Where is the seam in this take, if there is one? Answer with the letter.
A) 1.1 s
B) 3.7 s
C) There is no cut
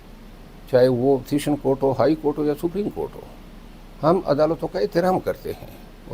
C